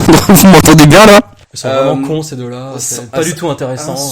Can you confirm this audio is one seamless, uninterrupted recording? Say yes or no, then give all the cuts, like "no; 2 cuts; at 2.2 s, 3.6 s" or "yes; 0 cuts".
no; 1 cut; at 1.4 s